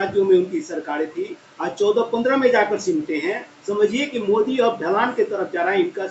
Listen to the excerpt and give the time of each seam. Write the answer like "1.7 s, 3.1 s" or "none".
none